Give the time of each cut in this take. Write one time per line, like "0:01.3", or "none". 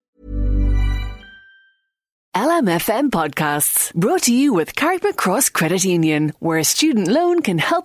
0:02.2

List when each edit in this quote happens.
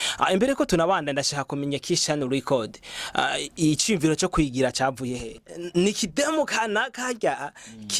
0:05.5

